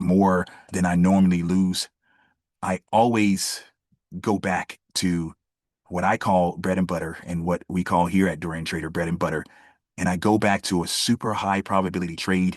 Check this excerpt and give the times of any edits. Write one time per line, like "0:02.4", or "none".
none